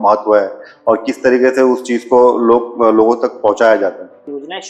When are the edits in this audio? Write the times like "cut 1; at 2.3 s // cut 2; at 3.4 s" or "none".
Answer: none